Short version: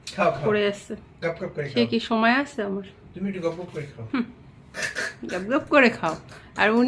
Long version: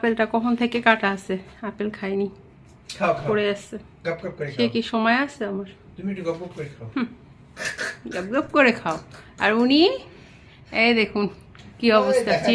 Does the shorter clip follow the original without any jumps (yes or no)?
yes